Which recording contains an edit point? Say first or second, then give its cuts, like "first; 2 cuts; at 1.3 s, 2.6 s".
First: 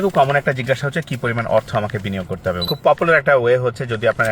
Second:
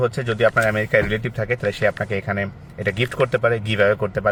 first; 1 cut; at 2.6 s